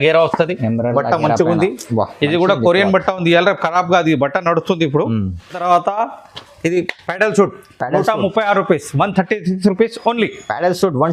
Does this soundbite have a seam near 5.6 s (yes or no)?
yes